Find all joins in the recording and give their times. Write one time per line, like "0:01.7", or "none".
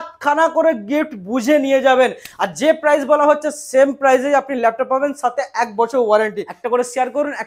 0:06.5